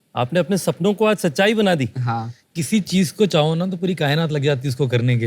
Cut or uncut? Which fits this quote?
uncut